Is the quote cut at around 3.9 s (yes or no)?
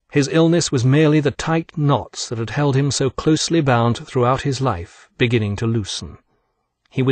yes